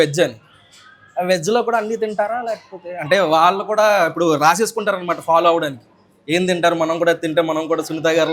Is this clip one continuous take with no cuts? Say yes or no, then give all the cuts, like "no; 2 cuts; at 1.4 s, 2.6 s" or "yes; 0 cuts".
yes; 0 cuts